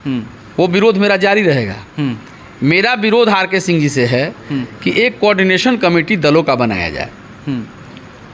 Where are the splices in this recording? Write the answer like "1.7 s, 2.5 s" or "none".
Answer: none